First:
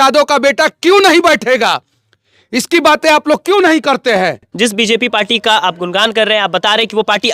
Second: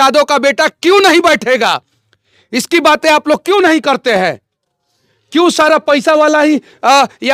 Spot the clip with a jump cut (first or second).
first